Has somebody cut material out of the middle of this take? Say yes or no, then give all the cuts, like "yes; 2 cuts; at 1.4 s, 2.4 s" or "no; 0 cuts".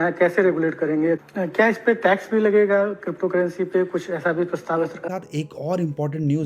yes; 2 cuts; at 1.2 s, 5.0 s